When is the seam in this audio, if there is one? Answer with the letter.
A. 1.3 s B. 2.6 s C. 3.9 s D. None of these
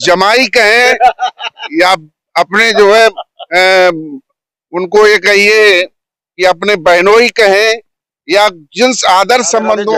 D